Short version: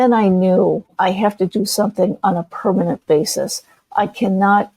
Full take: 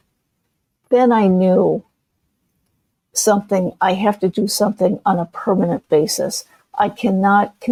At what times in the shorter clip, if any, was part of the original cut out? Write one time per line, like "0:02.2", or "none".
0:00.9